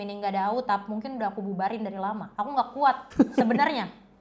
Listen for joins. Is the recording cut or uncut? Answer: cut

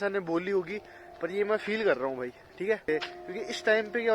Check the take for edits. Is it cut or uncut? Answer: cut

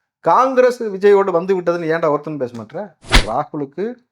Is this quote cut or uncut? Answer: cut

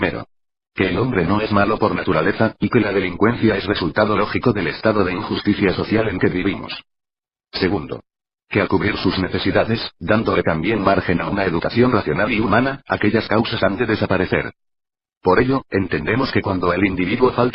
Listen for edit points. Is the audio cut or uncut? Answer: uncut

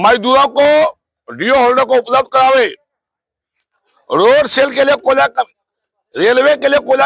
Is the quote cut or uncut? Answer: uncut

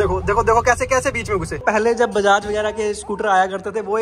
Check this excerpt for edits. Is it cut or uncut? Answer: cut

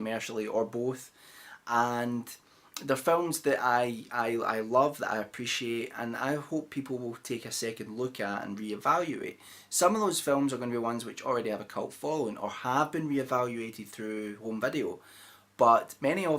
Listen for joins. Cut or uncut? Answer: cut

